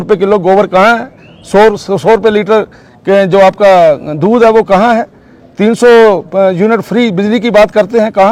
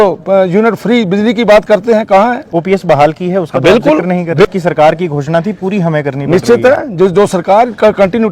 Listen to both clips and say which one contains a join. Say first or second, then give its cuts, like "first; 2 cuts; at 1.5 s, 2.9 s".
second; 1 cut; at 4.5 s